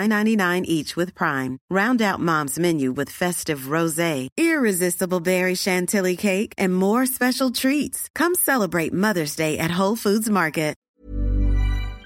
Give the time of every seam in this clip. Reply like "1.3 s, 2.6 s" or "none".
10.8 s